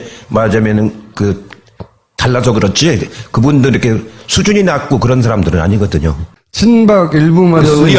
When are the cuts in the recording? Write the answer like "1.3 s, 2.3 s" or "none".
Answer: none